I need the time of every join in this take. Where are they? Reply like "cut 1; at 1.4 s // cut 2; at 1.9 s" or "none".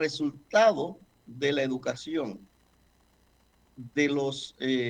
none